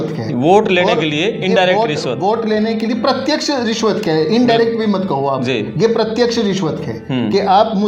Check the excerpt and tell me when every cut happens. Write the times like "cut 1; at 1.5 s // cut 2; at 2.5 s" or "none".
none